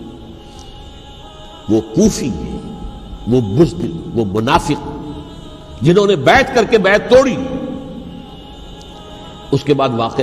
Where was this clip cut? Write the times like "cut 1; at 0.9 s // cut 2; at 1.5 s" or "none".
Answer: cut 1; at 8.4 s